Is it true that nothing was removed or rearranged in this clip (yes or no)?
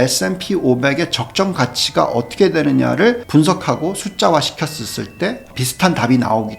no